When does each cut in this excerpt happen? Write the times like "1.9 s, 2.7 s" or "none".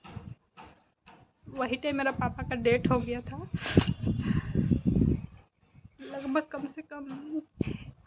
none